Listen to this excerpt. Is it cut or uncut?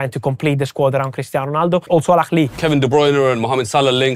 cut